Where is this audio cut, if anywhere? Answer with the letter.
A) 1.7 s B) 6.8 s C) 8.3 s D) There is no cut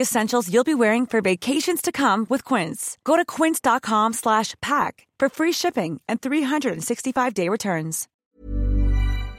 C